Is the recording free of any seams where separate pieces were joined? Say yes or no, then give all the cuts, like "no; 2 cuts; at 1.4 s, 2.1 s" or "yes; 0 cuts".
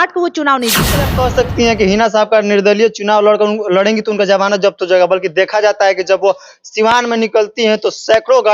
no; 1 cut; at 1.1 s